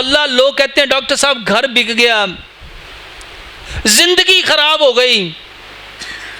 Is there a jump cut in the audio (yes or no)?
no